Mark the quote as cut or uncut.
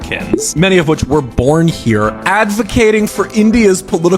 uncut